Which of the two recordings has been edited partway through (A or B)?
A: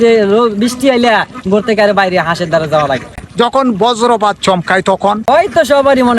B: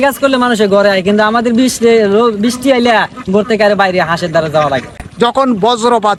A